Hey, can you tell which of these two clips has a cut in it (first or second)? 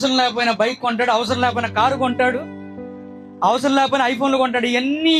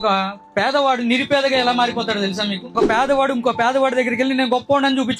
second